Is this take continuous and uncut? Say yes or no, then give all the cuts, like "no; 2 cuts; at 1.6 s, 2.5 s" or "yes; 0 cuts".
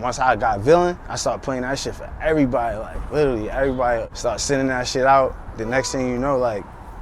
no; 2 cuts; at 1.1 s, 4.1 s